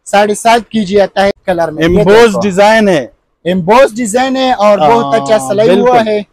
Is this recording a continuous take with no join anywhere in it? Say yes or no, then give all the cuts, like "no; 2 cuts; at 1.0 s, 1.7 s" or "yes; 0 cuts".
no; 1 cut; at 1.3 s